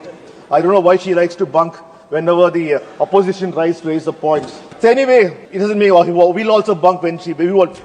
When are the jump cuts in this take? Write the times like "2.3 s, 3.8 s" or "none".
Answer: 4.6 s, 5.4 s